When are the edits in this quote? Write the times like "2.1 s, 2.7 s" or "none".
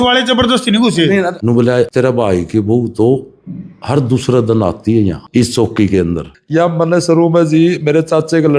1.4 s, 5.2 s, 6.3 s